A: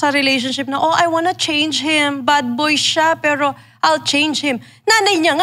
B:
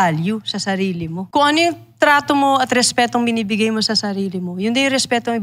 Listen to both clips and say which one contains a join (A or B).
B